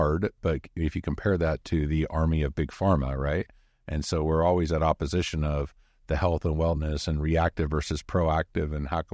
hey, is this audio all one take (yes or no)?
yes